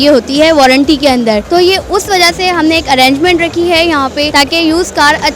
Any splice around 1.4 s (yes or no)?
yes